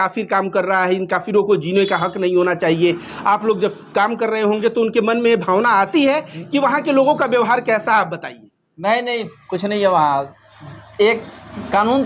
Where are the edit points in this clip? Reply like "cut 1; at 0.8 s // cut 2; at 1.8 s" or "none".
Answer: none